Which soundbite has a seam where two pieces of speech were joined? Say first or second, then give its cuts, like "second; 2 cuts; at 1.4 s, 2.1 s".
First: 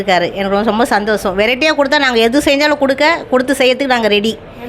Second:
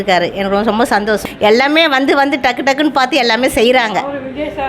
second; 1 cut; at 1.3 s